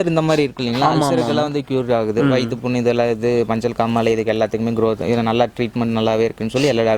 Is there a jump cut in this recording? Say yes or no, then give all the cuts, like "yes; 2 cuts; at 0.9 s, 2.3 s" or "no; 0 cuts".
no; 0 cuts